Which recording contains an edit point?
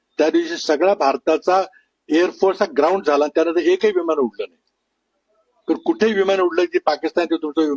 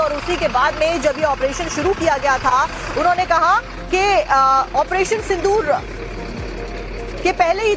first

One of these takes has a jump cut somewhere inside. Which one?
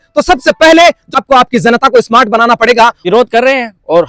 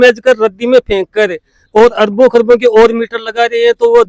first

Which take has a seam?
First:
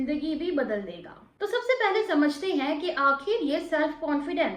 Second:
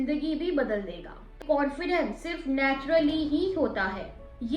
second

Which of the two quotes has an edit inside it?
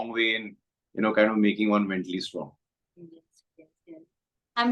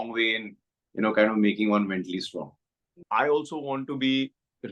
second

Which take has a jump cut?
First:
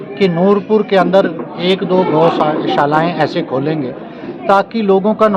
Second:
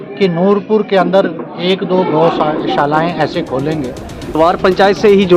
second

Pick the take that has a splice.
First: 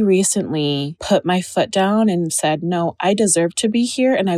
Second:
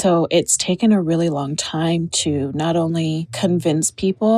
first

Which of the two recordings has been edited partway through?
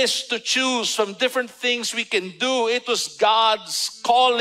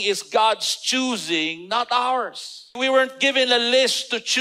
second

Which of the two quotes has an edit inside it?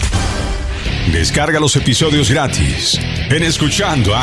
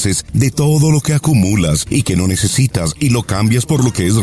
first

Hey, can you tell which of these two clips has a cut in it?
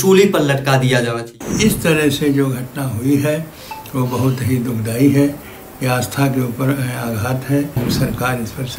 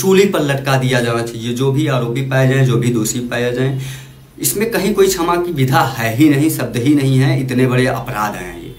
first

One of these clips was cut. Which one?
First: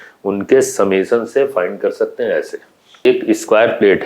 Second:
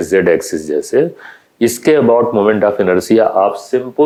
first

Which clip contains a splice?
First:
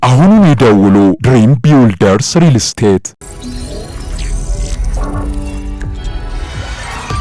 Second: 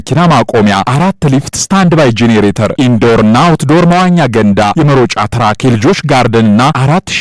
first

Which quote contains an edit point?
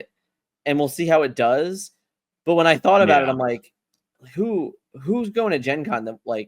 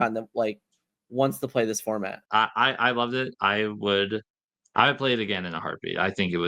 second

